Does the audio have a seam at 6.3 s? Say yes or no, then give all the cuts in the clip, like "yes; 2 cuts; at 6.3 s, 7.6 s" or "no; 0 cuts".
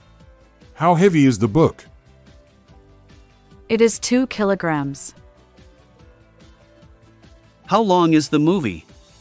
no; 5 cuts; at 0.7 s, 1.8 s, 3.7 s, 5.0 s, 7.7 s